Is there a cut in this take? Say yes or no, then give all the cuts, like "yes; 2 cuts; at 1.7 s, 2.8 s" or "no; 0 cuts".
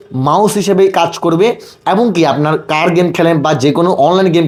no; 0 cuts